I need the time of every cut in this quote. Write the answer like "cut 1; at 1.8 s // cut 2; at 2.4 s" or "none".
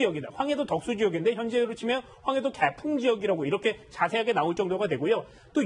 cut 1; at 4.2 s